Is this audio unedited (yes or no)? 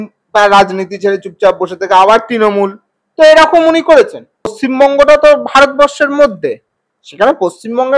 no